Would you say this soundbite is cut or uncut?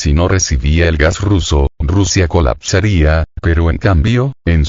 cut